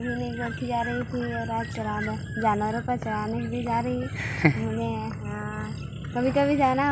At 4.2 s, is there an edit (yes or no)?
no